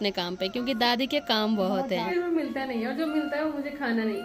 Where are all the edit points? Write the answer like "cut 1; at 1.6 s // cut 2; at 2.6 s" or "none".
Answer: cut 1; at 2.1 s